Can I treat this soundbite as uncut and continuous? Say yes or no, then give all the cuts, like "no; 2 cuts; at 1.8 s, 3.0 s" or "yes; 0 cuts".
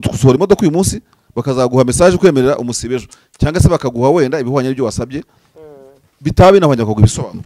yes; 0 cuts